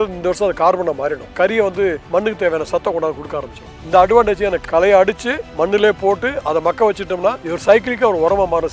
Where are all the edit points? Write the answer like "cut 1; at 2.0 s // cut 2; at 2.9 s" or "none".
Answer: cut 1; at 1.5 s // cut 2; at 4.6 s // cut 3; at 7.5 s